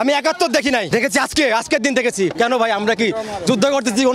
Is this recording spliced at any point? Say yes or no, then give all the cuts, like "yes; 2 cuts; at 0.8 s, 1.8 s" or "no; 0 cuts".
yes; 2 cuts; at 0.9 s, 2.3 s